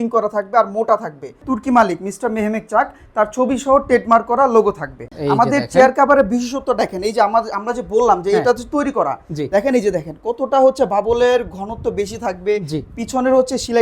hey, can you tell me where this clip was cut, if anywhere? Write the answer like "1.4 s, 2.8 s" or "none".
1.4 s, 5.1 s

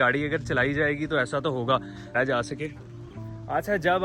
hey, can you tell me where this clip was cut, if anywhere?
2.1 s

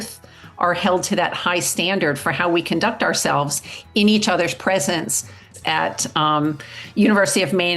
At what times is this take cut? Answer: 5.5 s

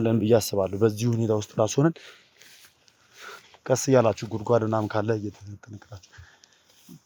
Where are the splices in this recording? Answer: none

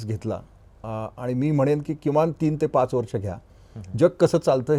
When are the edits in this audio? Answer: none

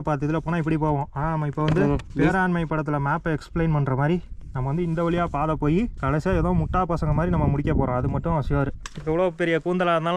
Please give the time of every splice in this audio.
2.1 s, 6.0 s, 8.9 s

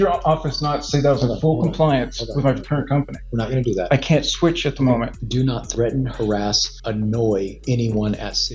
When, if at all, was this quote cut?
5.2 s, 6.7 s, 7.6 s

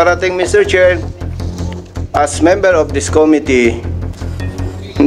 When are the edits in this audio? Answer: none

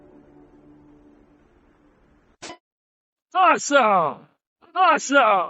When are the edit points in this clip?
2.5 s

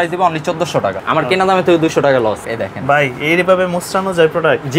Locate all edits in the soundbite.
1.0 s, 2.4 s

